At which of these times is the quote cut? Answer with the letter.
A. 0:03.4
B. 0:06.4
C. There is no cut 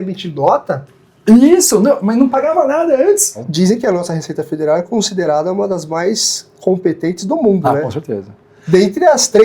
A